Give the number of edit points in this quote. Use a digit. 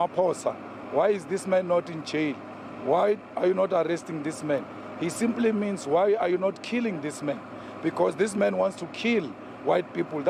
0